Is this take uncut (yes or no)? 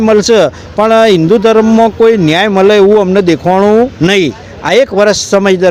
yes